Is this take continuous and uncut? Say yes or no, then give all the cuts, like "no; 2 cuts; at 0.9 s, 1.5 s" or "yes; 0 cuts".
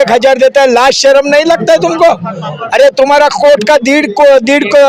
yes; 0 cuts